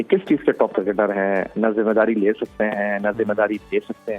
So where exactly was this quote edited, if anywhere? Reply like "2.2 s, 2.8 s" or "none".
none